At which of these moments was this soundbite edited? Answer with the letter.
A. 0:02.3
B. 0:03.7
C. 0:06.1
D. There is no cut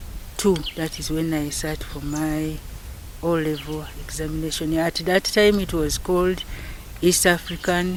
D